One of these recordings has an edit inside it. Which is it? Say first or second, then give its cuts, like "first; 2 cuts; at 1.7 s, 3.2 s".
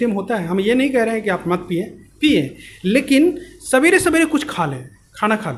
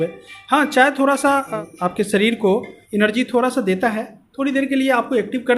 second; 2 cuts; at 1.5 s, 2.8 s